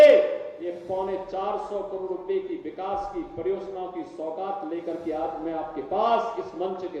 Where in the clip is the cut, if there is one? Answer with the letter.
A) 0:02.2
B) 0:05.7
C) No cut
C